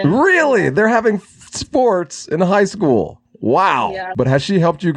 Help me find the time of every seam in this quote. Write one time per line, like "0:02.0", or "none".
0:04.0